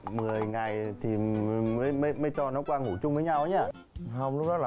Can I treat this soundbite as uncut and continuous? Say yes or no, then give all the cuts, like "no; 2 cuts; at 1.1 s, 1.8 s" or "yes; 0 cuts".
no; 1 cut; at 3.7 s